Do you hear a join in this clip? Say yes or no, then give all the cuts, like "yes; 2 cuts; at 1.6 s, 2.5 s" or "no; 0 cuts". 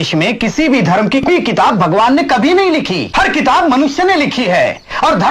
yes; 2 cuts; at 1.3 s, 3.0 s